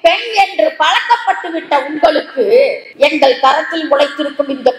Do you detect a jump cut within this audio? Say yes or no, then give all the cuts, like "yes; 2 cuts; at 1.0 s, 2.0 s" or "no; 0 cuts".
yes; 1 cut; at 2.8 s